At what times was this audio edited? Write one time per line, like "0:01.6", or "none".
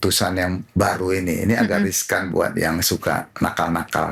none